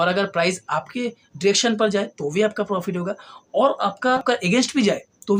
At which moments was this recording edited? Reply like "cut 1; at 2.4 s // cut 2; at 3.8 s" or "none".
cut 1; at 4.2 s